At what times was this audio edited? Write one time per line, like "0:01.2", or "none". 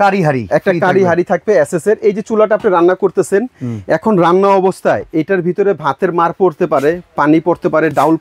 none

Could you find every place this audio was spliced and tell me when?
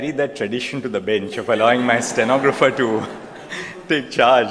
none

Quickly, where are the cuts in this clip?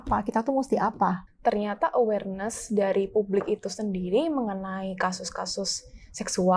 0:01.2

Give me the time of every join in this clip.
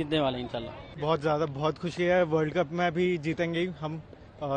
0:01.1

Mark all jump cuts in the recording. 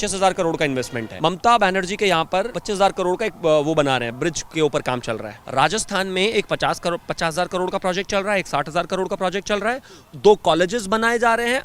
0:01.0
0:02.6
0:05.3

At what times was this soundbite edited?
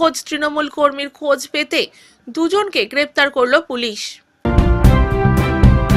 0:04.4

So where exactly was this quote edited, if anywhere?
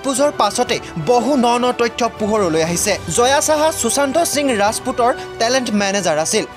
none

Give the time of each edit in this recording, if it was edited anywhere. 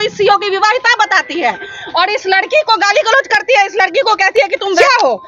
0:04.4

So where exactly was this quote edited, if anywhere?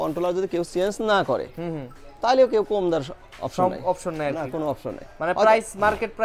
none

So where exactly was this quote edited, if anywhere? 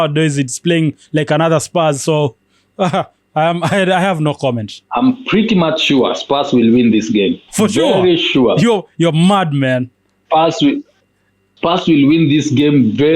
0:04.7

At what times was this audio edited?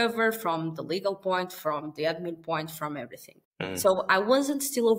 0:03.8

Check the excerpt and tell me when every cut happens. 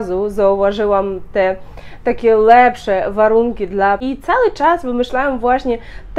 0:04.0

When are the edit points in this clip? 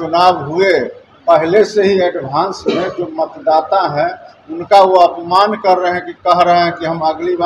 none

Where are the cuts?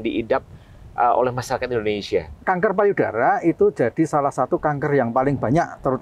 0:02.4

